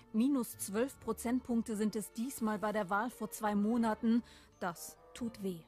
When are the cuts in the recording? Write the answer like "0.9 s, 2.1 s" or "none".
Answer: 3.3 s